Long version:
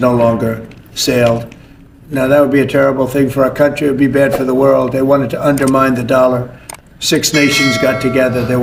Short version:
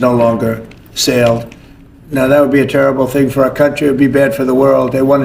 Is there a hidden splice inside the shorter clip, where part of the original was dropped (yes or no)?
no